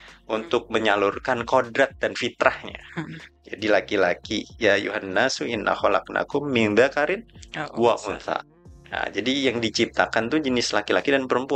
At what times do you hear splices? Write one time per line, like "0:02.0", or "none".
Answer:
none